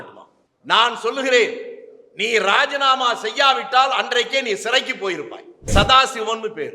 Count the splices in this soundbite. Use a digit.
1